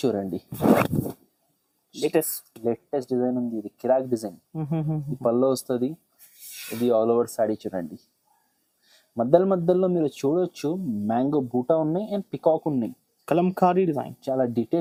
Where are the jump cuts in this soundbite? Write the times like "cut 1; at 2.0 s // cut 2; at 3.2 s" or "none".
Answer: none